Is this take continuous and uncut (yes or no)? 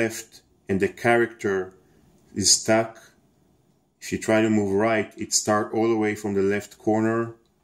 no